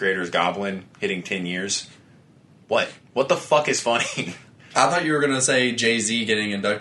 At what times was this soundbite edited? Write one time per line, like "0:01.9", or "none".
none